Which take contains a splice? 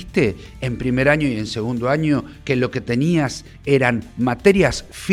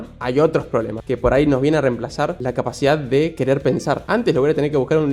second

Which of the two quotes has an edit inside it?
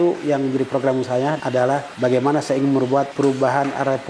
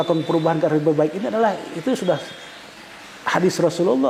first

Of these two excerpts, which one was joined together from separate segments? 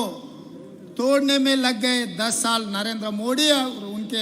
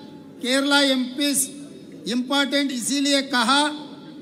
first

